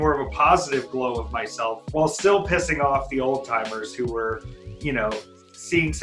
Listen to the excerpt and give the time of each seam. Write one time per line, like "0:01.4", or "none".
0:01.8